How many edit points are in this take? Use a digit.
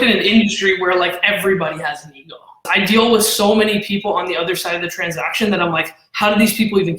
1